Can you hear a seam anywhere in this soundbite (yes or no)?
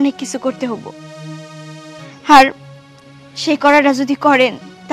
yes